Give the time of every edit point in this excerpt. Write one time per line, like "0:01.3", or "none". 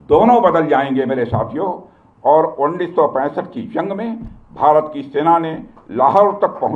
none